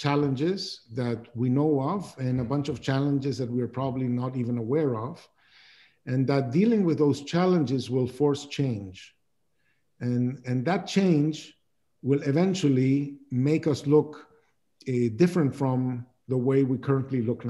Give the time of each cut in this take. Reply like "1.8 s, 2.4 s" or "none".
none